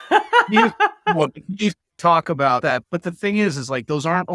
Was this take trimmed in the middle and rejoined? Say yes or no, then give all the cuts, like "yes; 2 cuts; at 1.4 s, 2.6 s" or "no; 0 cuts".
yes; 1 cut; at 2.7 s